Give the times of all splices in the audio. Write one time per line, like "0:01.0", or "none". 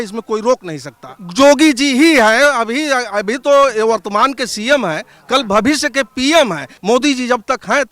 0:01.1
0:06.7